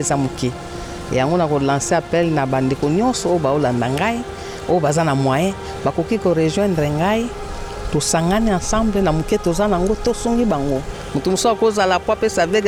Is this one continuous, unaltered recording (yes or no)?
yes